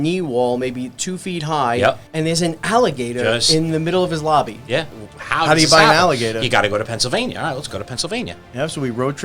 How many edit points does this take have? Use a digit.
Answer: 2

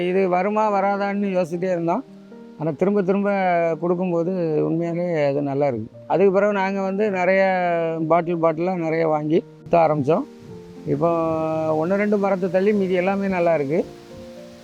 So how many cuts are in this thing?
0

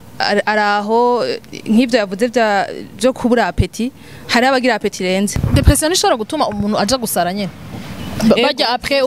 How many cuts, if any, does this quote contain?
1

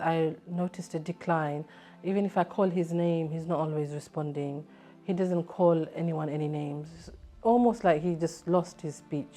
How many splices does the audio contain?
0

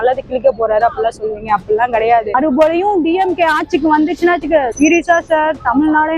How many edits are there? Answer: 1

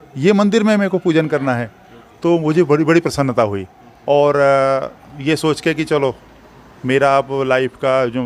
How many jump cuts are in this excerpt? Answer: 0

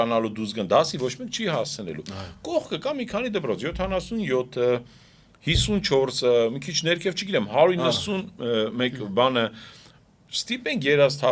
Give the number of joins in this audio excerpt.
0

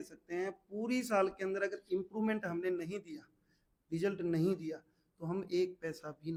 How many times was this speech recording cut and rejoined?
0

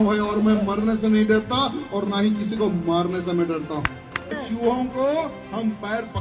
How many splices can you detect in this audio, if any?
1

